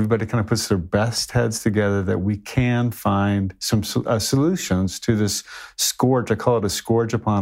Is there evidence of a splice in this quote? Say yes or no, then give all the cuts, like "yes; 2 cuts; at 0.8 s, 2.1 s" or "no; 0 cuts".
no; 0 cuts